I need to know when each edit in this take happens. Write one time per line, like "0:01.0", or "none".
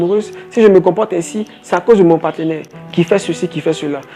0:02.8